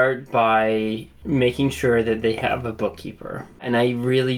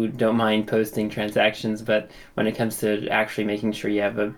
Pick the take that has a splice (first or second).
first